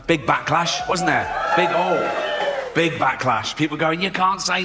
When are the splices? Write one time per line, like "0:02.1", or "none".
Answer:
none